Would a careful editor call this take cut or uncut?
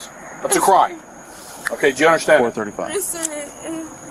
uncut